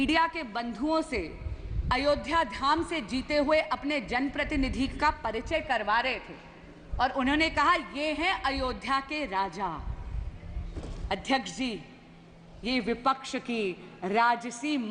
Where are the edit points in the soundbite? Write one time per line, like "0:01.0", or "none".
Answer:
none

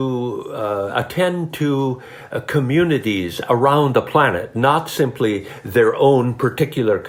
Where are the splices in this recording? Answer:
none

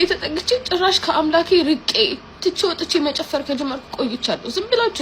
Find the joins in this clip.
0:02.2

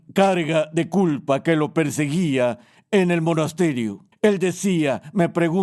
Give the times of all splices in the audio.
0:04.0

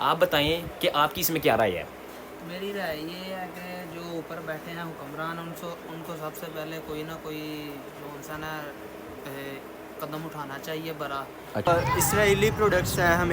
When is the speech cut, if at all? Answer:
0:11.7

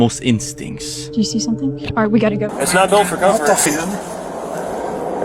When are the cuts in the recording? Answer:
0:02.5

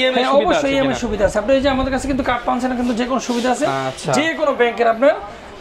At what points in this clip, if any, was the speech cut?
none

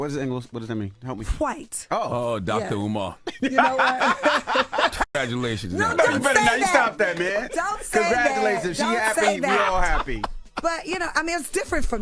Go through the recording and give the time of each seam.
0:05.1

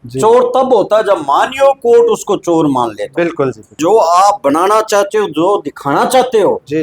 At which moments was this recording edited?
0:03.8

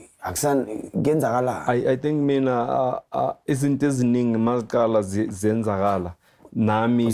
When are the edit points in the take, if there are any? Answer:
none

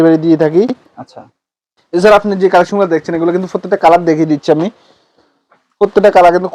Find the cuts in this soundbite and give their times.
none

